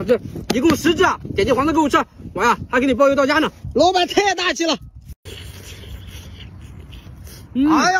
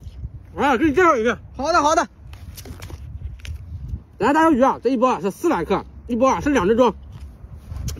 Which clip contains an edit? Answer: first; 1 cut; at 4.9 s

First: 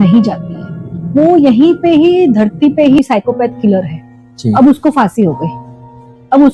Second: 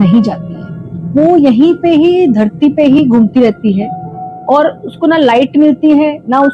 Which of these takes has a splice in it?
first; 1 cut; at 3.0 s

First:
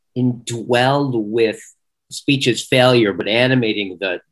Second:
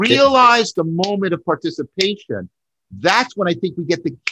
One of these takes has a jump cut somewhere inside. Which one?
first; 2 cuts; at 2.1 s, 3.2 s

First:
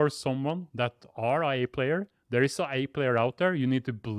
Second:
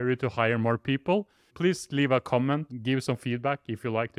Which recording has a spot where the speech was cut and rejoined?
second; 2 cuts; at 1.5 s, 2.7 s

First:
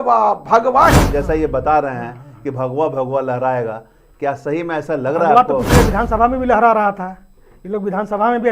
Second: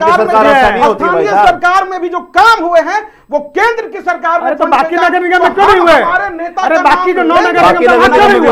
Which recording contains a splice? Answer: first; 1 cut; at 1.0 s

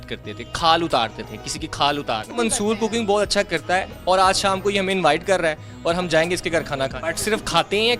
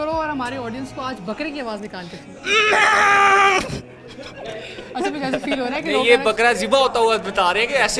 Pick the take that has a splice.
first; 2 cuts; at 2.4 s, 7.1 s

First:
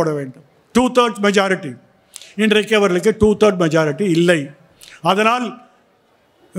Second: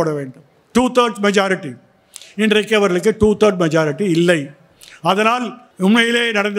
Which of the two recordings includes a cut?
second; 1 cut; at 5.6 s

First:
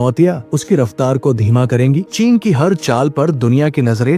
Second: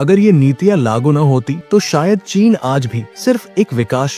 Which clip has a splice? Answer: first; 1 cut; at 2.1 s

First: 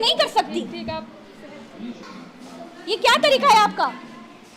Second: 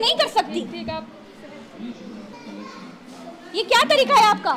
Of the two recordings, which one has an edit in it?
first; 1 cut; at 2.0 s

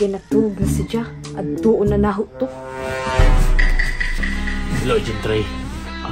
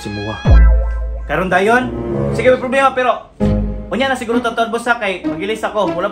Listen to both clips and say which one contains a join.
first; 1 cut; at 4.2 s

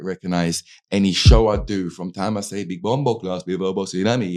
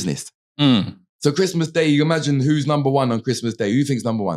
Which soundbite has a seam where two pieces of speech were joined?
second; 1 cut; at 1.1 s

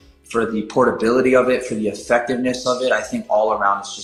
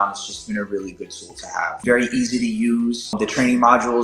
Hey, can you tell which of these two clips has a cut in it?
second; 2 cuts; at 1.8 s, 3.1 s

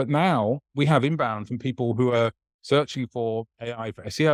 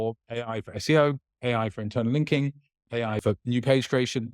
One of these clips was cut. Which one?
second; 1 cut; at 2.8 s

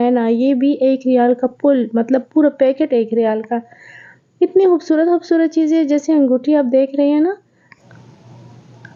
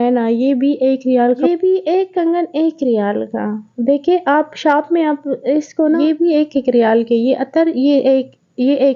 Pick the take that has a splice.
second; 2 cuts; at 1.4 s, 6.0 s

